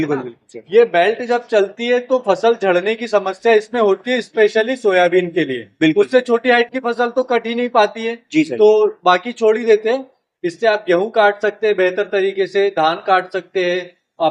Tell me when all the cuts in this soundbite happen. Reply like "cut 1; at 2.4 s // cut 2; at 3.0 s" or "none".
none